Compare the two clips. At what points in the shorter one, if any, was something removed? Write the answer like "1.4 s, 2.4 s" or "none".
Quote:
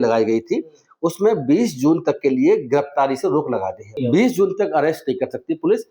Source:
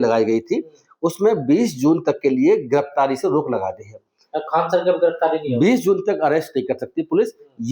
4.0 s